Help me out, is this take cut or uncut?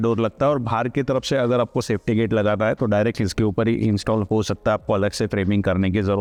uncut